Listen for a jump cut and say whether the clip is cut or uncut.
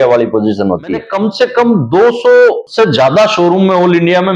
cut